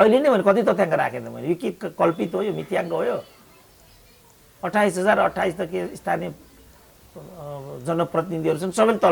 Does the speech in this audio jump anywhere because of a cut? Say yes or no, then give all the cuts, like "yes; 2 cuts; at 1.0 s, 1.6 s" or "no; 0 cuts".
no; 0 cuts